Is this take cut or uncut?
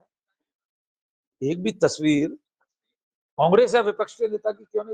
uncut